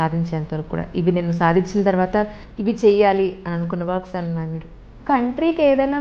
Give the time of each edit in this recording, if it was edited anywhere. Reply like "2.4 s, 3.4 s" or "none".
5.0 s